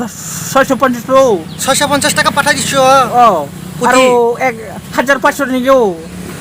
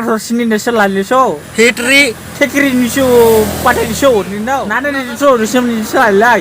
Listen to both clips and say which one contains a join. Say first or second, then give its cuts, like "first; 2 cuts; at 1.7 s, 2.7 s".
second; 1 cut; at 4.8 s